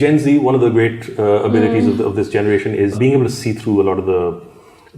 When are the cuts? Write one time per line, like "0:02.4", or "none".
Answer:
0:03.0